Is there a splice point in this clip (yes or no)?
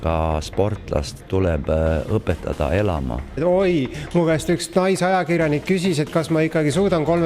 yes